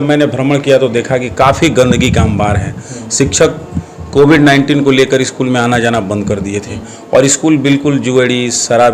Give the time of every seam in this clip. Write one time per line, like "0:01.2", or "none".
none